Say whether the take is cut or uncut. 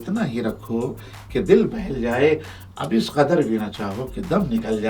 uncut